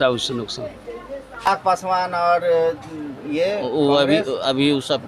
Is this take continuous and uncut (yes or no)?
no